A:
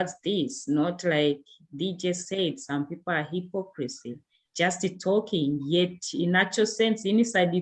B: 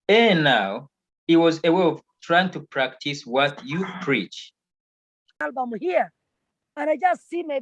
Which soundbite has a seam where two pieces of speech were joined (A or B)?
B